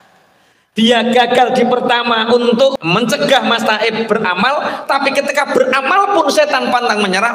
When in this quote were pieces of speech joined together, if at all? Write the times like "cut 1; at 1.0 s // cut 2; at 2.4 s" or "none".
cut 1; at 2.7 s